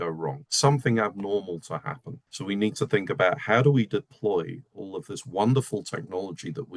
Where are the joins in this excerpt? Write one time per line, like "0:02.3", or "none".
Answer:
none